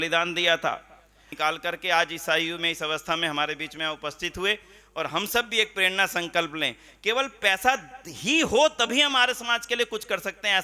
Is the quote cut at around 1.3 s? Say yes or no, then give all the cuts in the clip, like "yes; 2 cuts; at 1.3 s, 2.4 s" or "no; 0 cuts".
yes; 1 cut; at 1.3 s